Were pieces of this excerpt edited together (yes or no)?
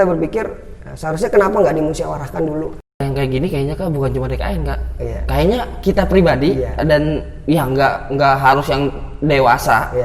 yes